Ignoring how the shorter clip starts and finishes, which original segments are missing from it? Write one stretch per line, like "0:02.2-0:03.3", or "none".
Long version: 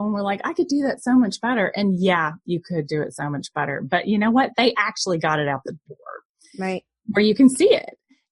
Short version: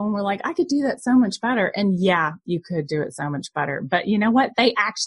none